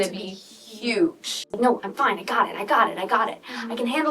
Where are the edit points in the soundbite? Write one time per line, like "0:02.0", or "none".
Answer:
0:01.4